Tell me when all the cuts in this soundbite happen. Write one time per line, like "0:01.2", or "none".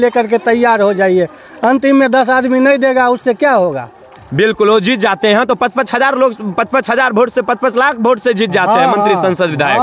none